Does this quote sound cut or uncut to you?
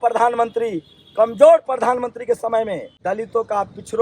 cut